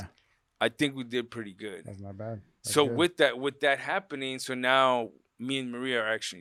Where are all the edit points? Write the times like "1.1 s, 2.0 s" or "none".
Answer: none